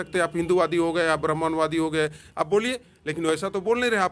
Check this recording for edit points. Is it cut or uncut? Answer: uncut